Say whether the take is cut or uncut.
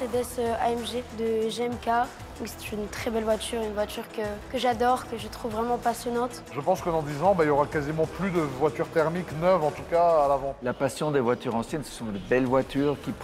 cut